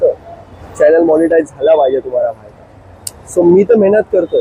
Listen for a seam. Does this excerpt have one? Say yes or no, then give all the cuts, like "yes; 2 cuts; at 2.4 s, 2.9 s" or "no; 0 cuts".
no; 0 cuts